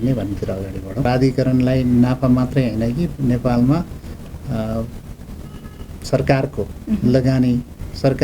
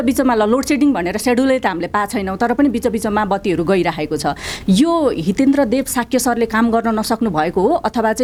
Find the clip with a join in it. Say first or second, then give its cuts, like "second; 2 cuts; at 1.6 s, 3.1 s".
first; 1 cut; at 1.0 s